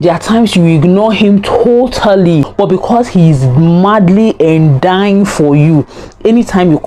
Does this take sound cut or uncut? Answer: cut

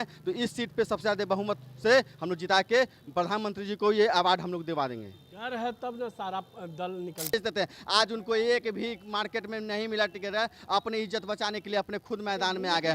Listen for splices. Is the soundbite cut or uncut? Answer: cut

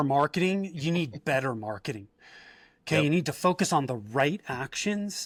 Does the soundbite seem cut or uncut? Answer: uncut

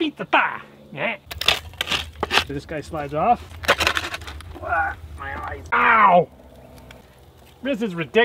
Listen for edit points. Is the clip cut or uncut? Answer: cut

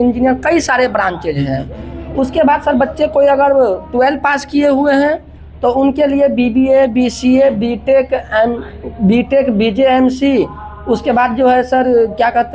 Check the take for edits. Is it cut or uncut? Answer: uncut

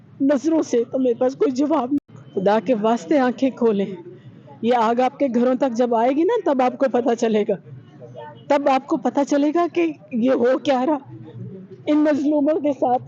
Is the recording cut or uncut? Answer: cut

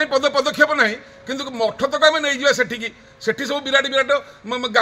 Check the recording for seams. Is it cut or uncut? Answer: uncut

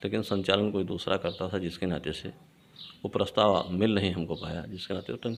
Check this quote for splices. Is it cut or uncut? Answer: uncut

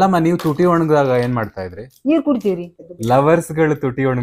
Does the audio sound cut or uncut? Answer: cut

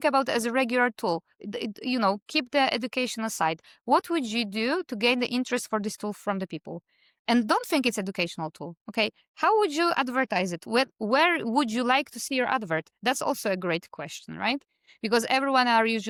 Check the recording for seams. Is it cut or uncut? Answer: uncut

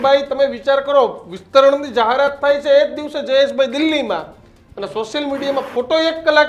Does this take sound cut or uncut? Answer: uncut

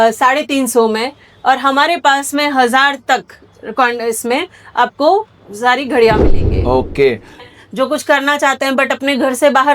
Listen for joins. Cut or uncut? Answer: cut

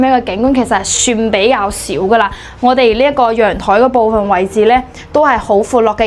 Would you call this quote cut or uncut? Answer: uncut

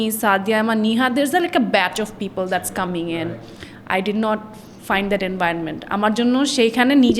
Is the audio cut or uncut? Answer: uncut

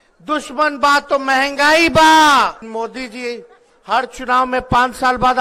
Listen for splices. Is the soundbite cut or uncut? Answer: cut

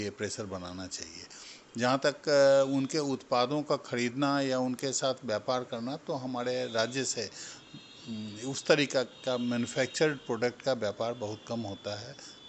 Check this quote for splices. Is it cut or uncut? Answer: uncut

